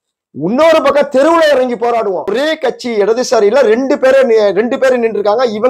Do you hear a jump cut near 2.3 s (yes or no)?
yes